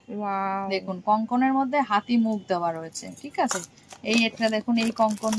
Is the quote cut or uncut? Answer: uncut